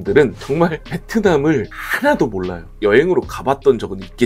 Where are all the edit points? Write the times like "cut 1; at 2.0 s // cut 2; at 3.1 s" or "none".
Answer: none